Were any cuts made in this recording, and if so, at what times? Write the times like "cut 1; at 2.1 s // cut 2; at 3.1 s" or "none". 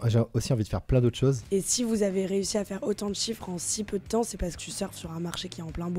cut 1; at 1.4 s // cut 2; at 4.6 s